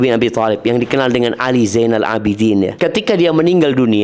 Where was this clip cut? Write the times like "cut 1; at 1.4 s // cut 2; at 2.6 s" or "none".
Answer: cut 1; at 2.7 s